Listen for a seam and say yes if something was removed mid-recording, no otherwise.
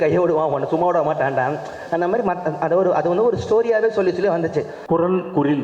yes